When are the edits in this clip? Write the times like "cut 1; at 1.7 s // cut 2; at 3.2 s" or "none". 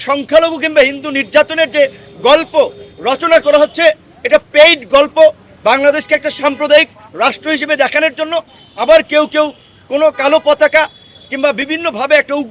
none